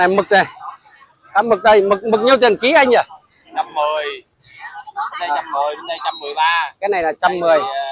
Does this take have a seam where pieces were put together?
no; 0 cuts

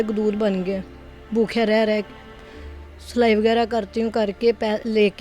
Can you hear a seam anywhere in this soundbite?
no; 0 cuts

